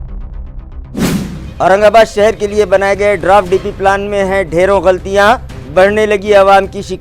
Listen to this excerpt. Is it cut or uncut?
uncut